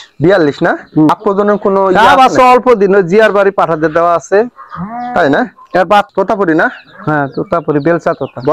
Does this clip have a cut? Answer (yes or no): yes